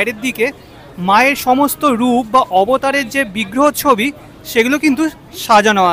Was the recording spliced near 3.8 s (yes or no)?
no